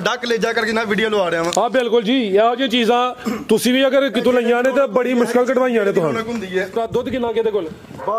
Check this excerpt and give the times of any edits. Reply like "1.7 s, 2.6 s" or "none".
6.7 s